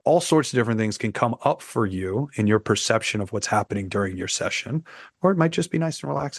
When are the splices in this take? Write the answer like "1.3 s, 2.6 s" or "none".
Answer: none